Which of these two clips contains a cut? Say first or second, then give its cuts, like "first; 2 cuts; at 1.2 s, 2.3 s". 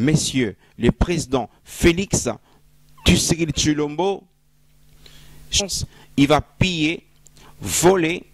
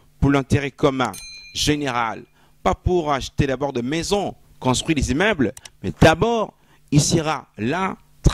first; 1 cut; at 5.6 s